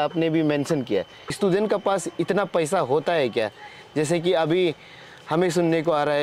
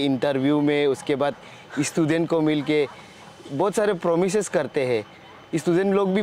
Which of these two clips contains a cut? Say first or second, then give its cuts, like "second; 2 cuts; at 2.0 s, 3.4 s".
first; 1 cut; at 1.4 s